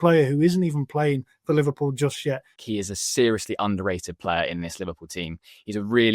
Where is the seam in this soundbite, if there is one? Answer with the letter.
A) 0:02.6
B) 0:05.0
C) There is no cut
A